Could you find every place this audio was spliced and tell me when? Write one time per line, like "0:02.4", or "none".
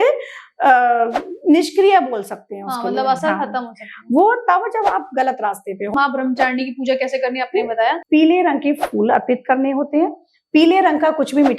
0:05.9
0:08.0

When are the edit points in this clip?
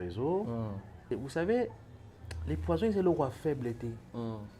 0:01.1

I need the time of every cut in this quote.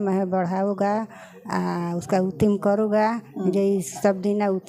none

